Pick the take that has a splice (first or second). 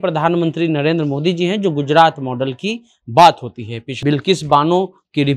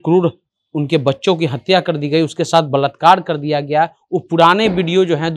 first